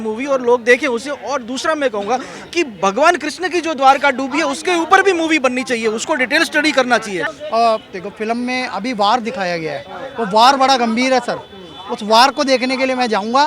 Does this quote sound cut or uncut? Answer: cut